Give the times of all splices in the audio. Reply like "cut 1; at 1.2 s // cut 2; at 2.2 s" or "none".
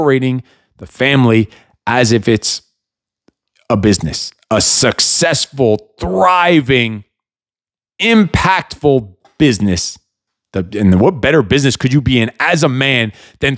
none